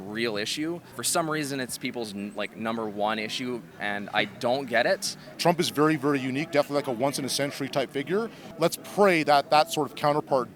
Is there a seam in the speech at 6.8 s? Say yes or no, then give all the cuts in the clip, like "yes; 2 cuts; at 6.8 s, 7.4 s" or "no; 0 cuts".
no; 4 cuts; at 0.9 s, 3.7 s, 5.2 s, 8.4 s